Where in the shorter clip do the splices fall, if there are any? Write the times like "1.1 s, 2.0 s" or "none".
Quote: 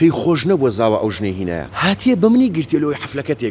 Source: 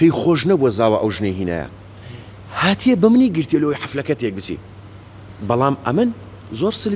1.7 s